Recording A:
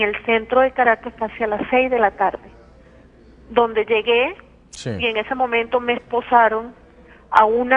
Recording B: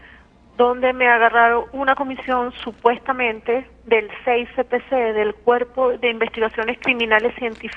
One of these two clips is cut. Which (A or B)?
A